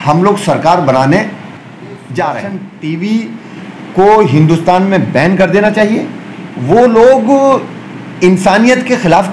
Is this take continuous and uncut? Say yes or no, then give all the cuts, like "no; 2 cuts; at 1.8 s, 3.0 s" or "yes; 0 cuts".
no; 1 cut; at 2.6 s